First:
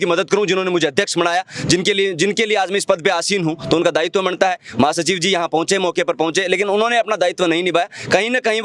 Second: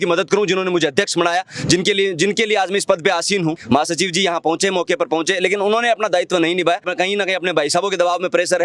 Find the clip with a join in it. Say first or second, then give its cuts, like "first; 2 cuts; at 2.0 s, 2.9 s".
second; 2 cuts; at 3.6 s, 6.9 s